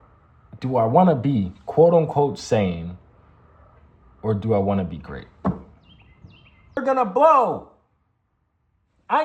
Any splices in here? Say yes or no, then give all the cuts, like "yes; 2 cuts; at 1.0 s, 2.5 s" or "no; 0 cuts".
yes; 1 cut; at 6.8 s